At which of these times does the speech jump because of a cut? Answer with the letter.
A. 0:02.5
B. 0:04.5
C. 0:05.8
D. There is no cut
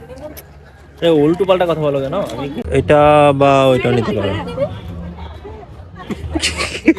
A